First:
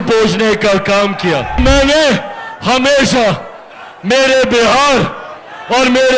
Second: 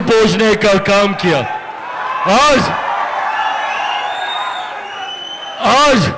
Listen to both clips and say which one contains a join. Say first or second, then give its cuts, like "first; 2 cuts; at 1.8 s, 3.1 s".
first; 1 cut; at 1.6 s